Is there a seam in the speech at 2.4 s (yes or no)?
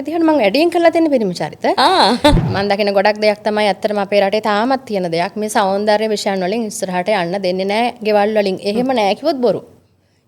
yes